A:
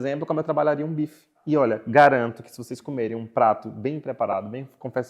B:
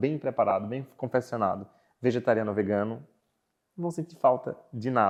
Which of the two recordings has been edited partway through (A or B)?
A